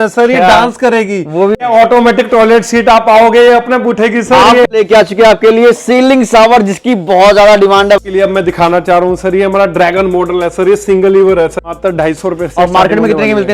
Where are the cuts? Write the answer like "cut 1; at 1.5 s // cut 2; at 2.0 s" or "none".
cut 1; at 1.6 s // cut 2; at 4.7 s // cut 3; at 8.0 s // cut 4; at 11.6 s